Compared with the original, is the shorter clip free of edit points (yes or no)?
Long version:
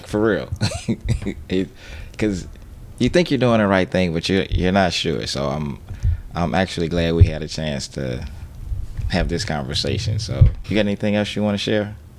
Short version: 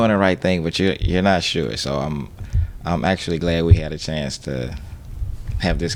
yes